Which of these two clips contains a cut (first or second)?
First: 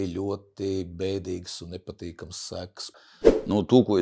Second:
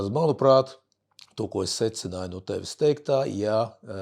first